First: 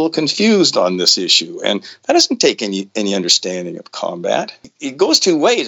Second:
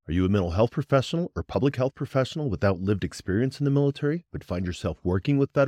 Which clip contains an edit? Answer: first; 1 cut; at 4.6 s

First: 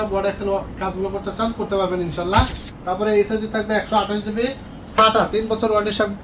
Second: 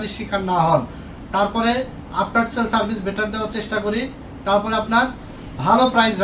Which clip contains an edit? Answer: first; 1 cut; at 2.6 s

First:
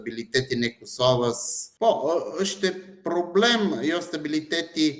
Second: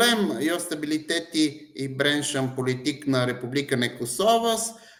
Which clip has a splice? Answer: first; 1 cut; at 1.7 s

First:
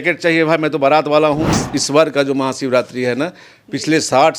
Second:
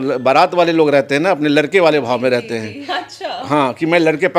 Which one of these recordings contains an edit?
first; 1 cut; at 1.5 s

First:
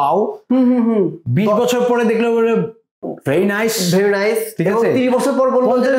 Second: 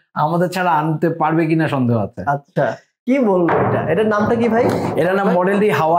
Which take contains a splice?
second; 1 cut; at 3.0 s

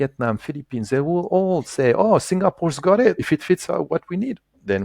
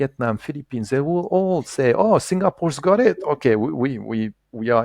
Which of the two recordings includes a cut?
first; 1 cut; at 3.2 s

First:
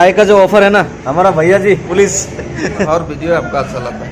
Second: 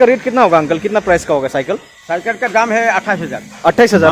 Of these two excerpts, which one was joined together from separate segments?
first; 2 cuts; at 1.9 s, 2.9 s

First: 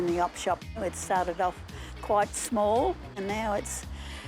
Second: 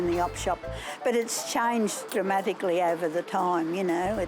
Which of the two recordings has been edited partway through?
first; 2 cuts; at 0.8 s, 3.2 s

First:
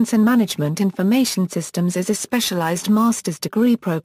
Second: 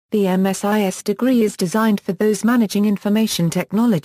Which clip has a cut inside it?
second; 2 cuts; at 1.4 s, 2.1 s

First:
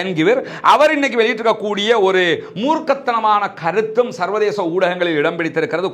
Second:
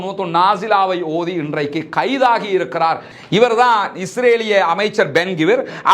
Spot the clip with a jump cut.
second; 1 cut; at 3.1 s

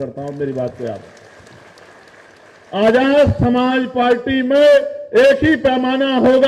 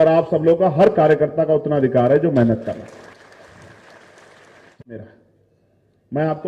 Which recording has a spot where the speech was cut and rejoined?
second; 1 cut; at 4.7 s

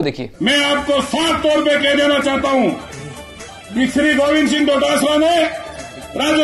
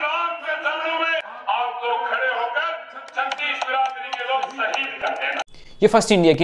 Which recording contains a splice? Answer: second; 1 cut; at 1.3 s

